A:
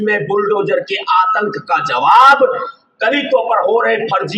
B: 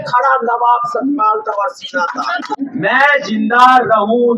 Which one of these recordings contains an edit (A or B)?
B